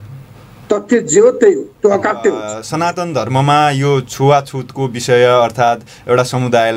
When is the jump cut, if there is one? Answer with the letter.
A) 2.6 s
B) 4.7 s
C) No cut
A